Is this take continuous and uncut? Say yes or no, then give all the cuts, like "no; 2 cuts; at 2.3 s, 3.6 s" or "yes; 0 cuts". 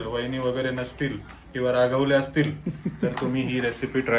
yes; 0 cuts